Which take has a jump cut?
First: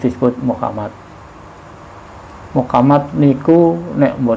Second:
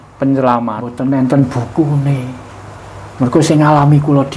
second; 1 cut; at 1.0 s

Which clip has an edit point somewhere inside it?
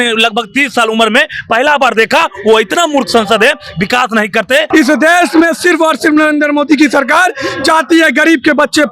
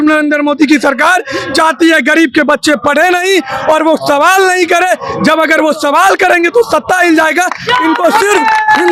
first; 1 cut; at 4.7 s

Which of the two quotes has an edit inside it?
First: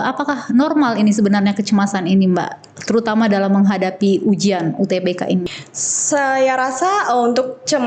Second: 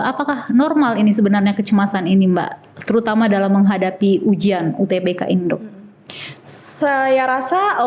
first; 1 cut; at 5.5 s

